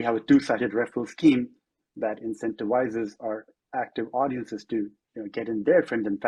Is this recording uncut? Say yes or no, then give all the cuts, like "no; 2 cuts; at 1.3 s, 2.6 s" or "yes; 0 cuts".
yes; 0 cuts